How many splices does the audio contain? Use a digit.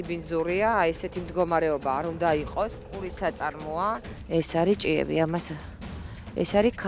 1